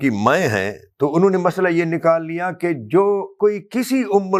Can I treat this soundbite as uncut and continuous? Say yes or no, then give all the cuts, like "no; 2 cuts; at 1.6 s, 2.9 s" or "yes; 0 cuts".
no; 1 cut; at 3.4 s